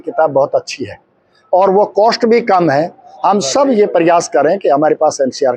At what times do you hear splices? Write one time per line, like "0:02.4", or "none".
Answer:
none